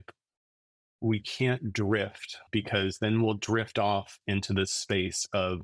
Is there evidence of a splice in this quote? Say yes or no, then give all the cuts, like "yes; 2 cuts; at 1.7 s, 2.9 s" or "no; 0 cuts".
yes; 1 cut; at 2.4 s